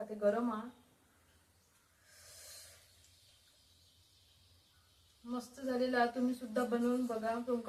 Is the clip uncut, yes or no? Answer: yes